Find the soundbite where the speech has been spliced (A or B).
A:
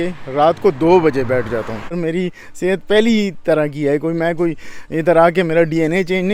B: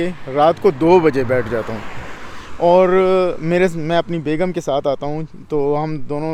A